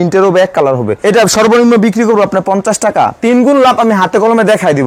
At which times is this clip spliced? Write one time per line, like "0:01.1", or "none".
0:01.0